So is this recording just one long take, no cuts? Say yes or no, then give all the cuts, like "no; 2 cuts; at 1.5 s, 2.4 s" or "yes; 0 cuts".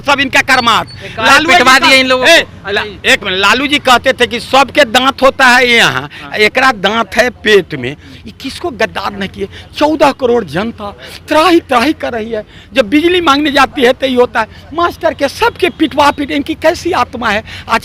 yes; 0 cuts